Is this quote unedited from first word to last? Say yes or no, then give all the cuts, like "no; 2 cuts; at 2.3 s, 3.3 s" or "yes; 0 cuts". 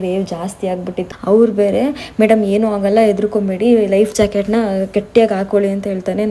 no; 1 cut; at 1.0 s